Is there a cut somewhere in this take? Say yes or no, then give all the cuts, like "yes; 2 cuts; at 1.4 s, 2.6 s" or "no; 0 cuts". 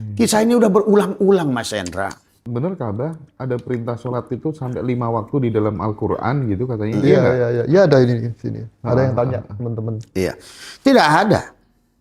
yes; 1 cut; at 2.4 s